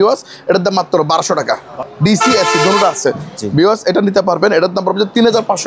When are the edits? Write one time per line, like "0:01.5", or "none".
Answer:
0:01.7